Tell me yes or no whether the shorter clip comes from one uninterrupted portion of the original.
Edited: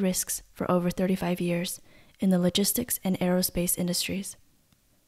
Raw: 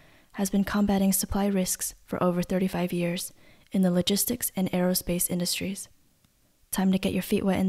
yes